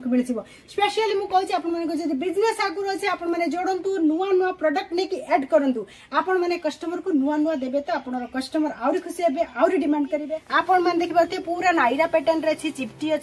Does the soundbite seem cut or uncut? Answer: cut